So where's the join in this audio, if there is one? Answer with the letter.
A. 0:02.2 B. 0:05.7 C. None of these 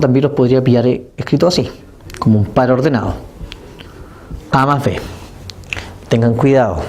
B